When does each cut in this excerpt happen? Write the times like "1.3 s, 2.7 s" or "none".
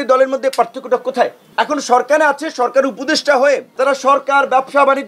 1.4 s, 3.7 s